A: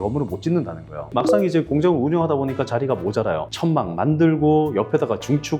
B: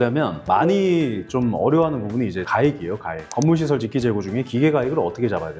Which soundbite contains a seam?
A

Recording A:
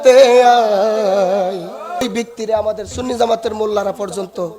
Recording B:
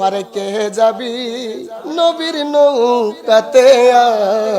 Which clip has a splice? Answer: A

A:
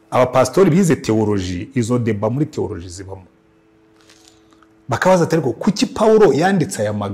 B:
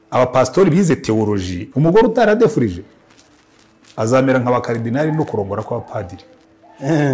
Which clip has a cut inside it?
B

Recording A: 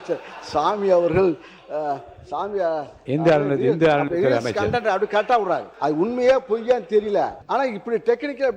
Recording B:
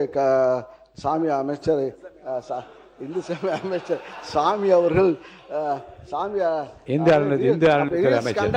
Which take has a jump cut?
A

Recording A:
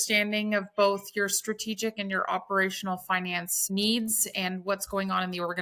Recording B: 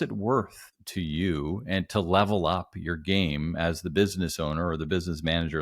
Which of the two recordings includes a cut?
A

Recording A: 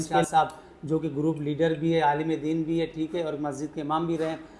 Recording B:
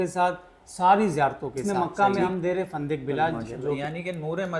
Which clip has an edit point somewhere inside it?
B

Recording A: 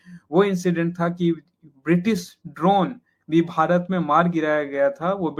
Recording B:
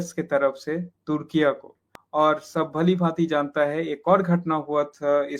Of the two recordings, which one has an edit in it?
B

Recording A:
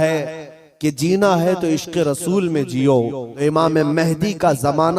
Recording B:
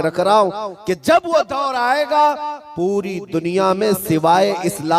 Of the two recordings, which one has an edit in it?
A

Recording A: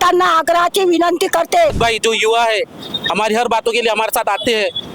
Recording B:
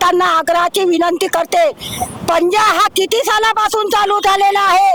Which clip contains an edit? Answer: A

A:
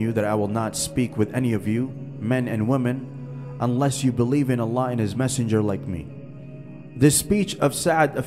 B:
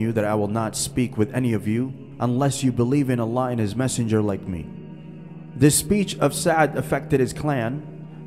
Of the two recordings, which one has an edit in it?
B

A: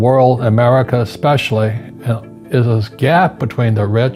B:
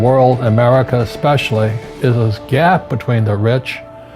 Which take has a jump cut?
B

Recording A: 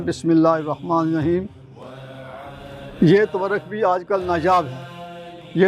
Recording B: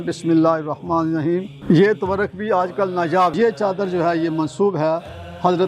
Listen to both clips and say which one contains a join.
B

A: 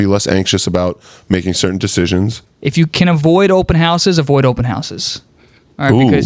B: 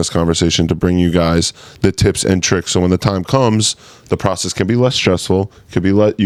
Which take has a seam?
A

